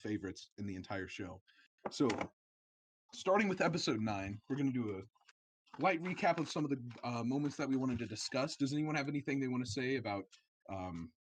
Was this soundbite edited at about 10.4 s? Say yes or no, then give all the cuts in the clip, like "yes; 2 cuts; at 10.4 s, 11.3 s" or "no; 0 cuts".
no; 0 cuts